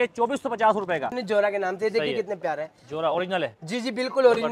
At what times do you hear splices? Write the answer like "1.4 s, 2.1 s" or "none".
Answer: 1.2 s